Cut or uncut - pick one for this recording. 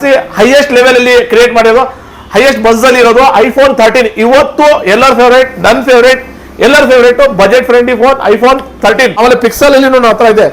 cut